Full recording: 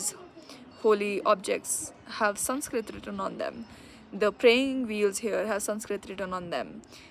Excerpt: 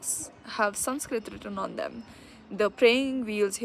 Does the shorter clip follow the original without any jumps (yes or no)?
yes